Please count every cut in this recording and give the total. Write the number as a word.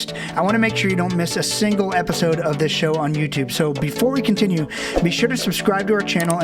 zero